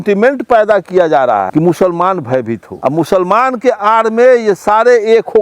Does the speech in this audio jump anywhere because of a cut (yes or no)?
yes